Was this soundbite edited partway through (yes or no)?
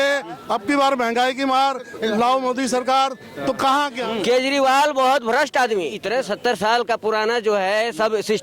yes